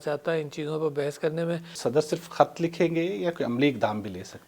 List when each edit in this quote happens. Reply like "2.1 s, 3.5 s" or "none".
1.7 s